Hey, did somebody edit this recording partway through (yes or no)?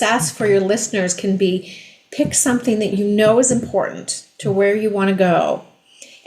yes